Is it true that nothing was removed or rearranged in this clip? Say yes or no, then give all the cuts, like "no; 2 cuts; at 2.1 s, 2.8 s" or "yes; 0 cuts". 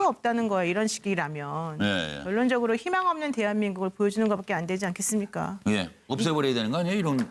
no; 1 cut; at 4.8 s